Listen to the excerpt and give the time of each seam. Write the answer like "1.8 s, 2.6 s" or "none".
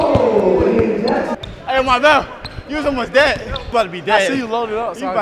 1.3 s, 3.5 s